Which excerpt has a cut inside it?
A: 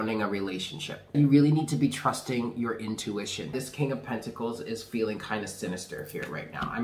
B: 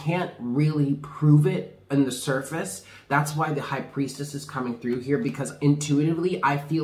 A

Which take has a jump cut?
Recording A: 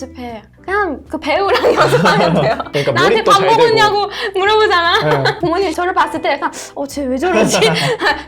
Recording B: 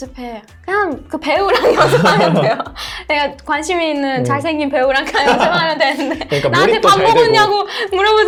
A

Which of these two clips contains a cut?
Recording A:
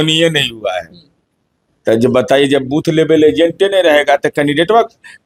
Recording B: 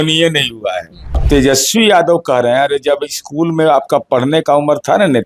B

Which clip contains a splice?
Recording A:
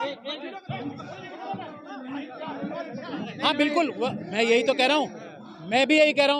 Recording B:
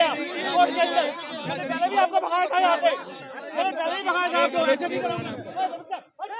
A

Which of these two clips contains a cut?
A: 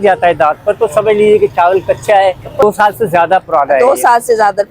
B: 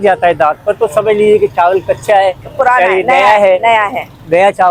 A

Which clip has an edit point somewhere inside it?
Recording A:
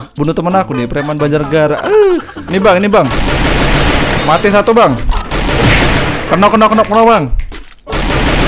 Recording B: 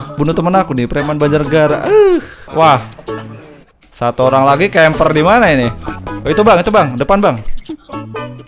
A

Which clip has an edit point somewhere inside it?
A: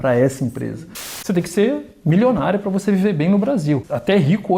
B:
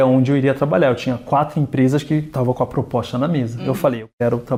A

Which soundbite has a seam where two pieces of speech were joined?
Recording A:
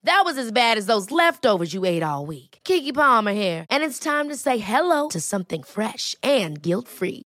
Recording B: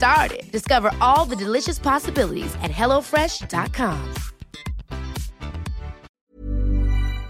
B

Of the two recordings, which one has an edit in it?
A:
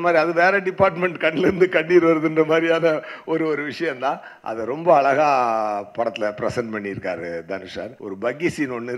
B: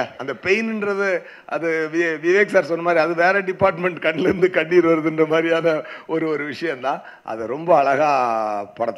A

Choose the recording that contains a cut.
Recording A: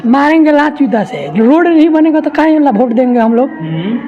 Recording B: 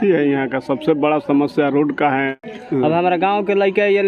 B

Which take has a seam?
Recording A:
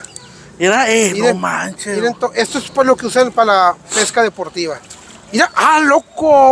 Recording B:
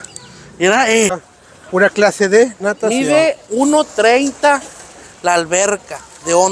B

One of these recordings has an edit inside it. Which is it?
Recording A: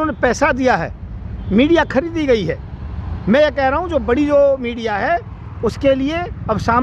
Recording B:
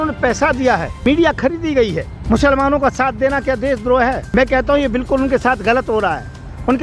B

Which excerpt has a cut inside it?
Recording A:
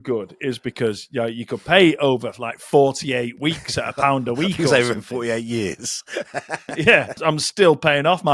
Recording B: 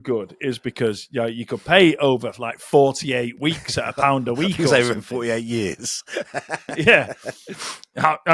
A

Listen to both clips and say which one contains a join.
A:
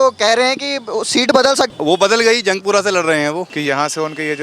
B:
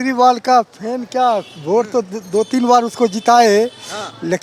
A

